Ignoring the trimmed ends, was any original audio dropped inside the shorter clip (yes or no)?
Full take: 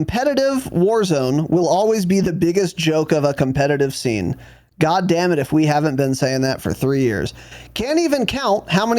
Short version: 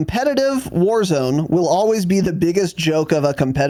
no